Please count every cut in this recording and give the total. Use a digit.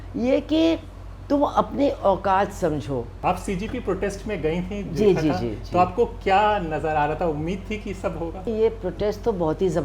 2